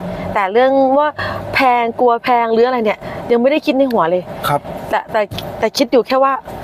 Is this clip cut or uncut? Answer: uncut